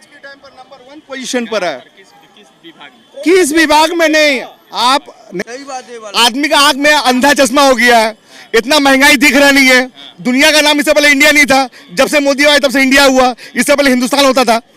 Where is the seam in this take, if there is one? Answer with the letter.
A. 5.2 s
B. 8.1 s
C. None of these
A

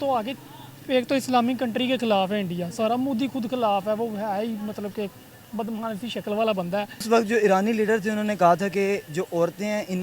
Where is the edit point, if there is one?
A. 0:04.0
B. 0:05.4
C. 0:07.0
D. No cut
C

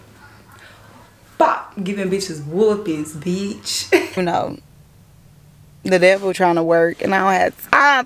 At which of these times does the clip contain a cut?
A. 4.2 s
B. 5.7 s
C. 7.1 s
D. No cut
A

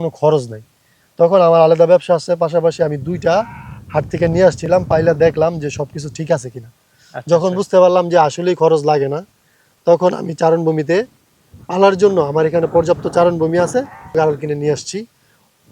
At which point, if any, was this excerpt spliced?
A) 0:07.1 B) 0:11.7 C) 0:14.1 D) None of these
C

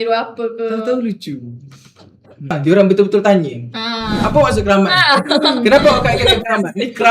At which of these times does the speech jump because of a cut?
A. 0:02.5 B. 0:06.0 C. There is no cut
A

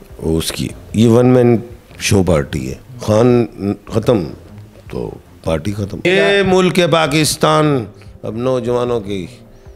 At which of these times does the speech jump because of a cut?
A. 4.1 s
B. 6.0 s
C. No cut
B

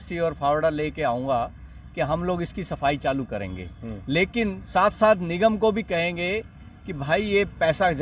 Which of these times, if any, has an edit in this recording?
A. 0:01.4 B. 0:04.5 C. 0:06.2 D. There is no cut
D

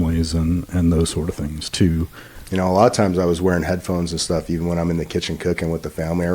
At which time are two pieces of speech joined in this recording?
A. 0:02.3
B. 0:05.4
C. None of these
A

